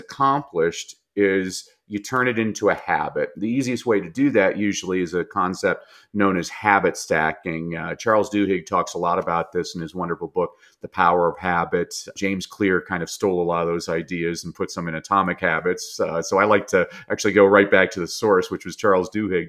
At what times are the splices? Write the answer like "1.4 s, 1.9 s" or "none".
none